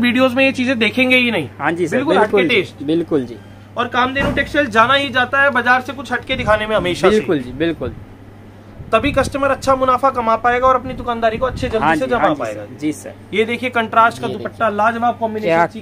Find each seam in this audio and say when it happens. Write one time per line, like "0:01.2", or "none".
none